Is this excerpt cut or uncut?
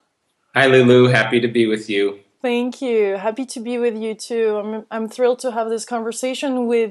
uncut